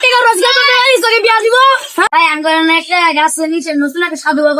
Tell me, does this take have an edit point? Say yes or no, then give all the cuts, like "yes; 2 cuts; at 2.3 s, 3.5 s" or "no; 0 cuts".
yes; 1 cut; at 2.1 s